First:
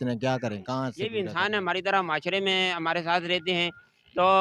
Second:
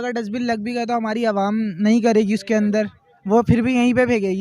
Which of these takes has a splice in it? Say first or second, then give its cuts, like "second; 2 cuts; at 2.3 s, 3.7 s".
first; 1 cut; at 1.0 s